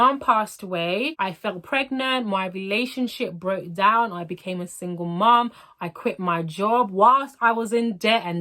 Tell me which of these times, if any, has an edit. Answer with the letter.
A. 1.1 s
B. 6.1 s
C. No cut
A